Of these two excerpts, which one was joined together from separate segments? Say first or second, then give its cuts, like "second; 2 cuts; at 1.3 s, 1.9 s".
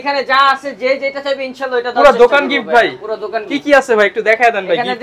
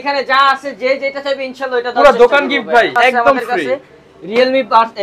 second; 1 cut; at 2.9 s